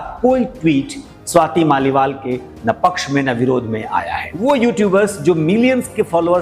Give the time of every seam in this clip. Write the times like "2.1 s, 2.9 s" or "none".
4.4 s